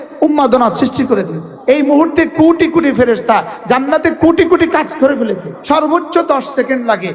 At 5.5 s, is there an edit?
yes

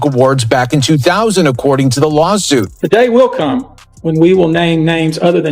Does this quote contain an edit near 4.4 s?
no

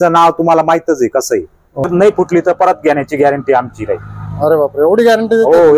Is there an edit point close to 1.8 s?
yes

